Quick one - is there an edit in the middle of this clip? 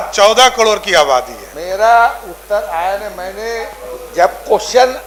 no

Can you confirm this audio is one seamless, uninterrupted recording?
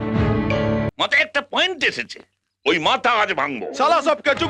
no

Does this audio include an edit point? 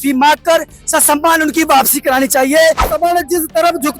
yes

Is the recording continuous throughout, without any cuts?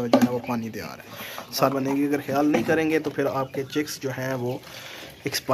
no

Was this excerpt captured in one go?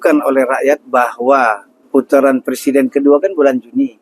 no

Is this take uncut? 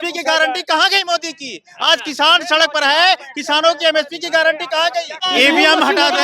no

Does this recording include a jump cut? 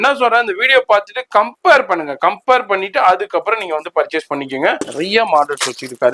yes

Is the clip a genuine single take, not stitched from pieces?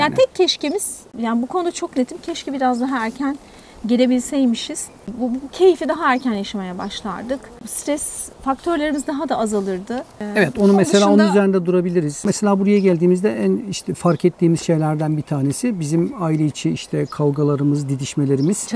yes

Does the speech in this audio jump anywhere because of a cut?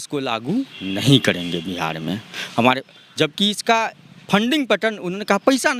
no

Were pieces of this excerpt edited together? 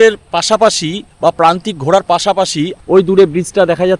yes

